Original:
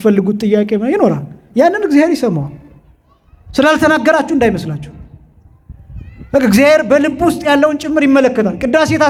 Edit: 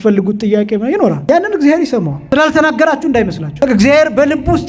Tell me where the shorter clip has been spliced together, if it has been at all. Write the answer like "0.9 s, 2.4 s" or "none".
1.2 s, 2.2 s, 3.5 s